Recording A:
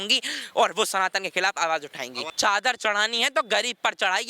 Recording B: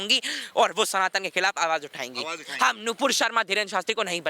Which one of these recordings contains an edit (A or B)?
A